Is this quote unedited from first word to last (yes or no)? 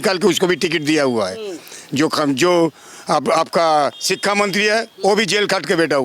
yes